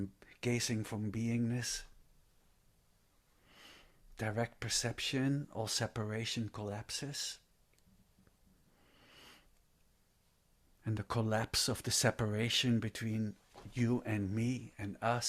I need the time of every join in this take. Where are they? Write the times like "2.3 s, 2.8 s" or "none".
none